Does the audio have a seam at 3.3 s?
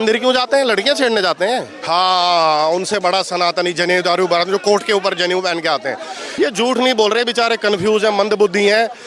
no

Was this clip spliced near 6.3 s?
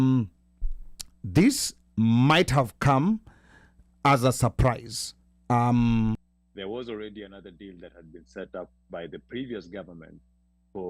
yes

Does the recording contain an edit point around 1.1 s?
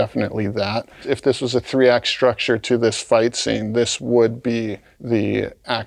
no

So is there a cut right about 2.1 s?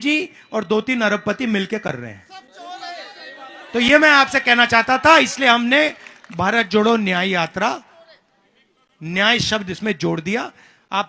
no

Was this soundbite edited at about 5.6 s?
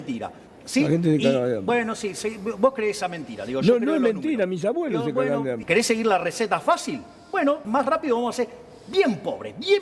yes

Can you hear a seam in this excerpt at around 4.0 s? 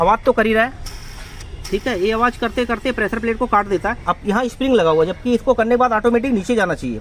yes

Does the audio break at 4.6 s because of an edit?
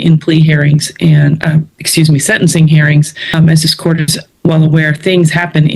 no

